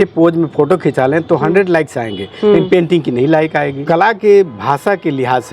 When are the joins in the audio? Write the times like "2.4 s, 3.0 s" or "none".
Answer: 3.8 s